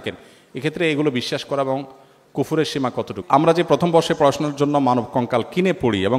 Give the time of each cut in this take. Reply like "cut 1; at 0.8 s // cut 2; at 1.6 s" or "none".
cut 1; at 3.2 s